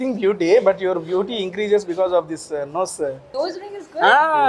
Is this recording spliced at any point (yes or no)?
yes